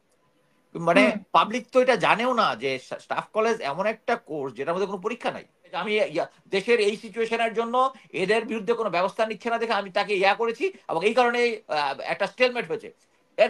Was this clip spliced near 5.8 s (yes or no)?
yes